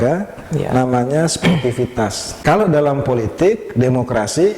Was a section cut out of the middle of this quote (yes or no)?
yes